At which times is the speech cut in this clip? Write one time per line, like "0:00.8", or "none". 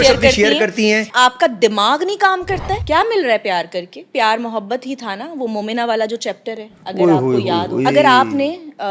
0:01.1
0:02.8
0:04.0
0:07.9

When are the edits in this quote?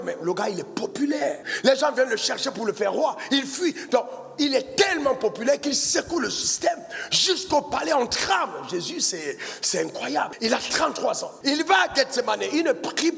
0:01.5
0:10.3
0:11.3

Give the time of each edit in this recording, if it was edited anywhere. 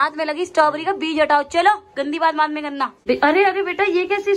0:03.0

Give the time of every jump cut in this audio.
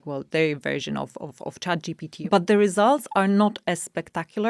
0:02.1

